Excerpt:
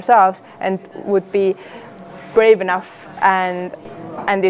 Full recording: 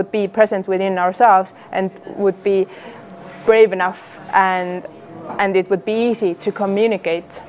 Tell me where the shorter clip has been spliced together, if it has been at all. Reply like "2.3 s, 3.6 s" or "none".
none